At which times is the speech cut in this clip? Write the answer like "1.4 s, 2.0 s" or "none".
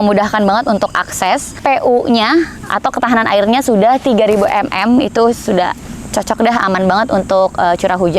1.6 s